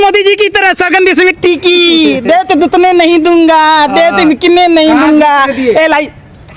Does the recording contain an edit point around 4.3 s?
no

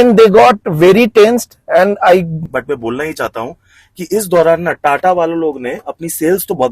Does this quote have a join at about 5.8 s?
no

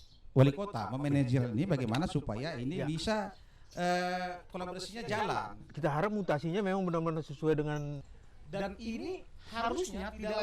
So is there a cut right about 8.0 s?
yes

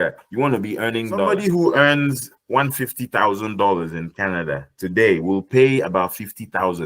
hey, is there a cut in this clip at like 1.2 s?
yes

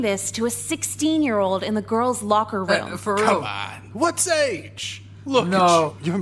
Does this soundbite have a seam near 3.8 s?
no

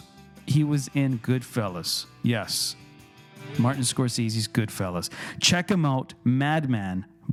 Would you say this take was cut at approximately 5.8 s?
no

